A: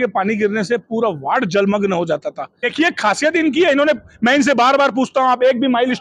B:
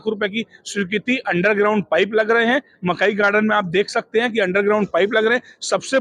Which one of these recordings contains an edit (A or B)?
A